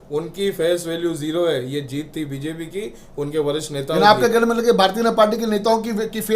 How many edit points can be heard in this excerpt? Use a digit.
0